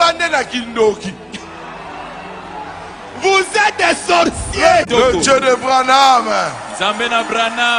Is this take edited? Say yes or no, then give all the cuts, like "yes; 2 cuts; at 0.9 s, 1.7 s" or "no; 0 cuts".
yes; 1 cut; at 4.8 s